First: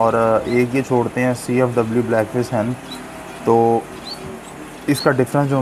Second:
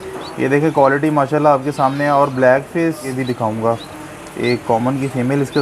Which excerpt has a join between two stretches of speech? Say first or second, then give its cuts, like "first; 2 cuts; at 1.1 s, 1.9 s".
second; 1 cut; at 3.1 s